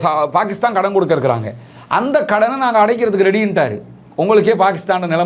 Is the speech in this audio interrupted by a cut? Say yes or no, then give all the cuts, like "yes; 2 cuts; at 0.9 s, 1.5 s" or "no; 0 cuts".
no; 0 cuts